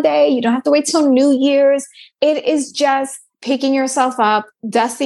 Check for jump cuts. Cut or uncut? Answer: cut